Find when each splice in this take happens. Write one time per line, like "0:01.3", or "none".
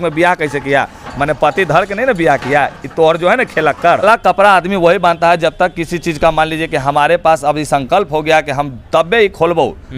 0:04.0

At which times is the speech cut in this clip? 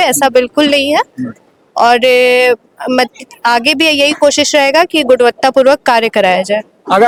none

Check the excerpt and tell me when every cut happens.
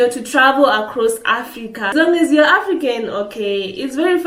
0:01.9

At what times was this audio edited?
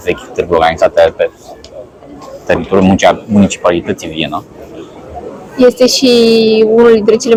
none

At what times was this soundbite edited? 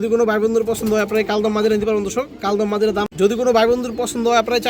0:03.3

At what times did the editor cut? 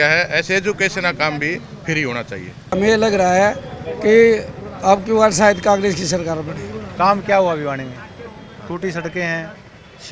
0:02.8
0:06.8

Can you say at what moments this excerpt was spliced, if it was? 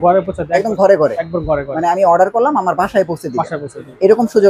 none

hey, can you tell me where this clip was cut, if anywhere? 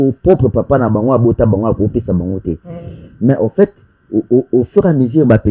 none

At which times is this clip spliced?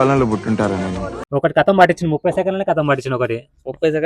0:01.2

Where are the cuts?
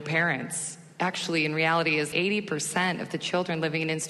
0:02.1

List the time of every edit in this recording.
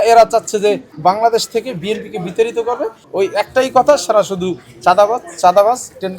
0:00.9
0:03.0

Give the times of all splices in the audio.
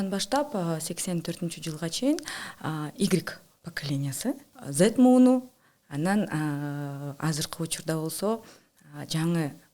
0:04.5

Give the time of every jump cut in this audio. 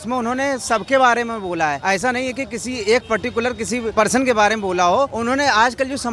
0:01.8
0:03.9
0:05.1

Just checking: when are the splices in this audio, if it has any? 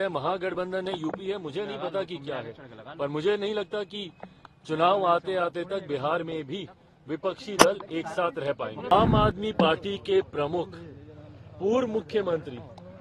0:08.9

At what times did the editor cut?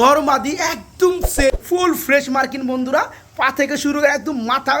0:01.5

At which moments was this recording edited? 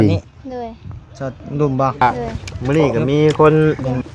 0:02.0

